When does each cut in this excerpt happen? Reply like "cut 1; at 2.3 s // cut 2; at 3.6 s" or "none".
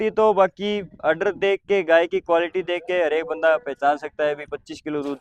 none

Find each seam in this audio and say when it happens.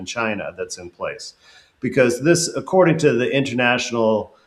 none

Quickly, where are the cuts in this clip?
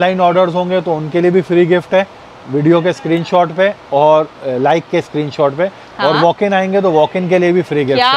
none

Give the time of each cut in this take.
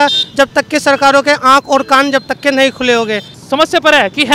cut 1; at 3.3 s

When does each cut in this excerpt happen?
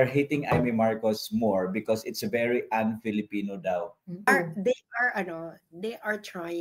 cut 1; at 4.3 s

